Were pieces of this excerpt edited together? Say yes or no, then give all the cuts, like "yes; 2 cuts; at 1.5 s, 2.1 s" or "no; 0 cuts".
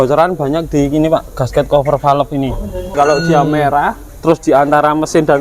yes; 2 cuts; at 2.9 s, 4.1 s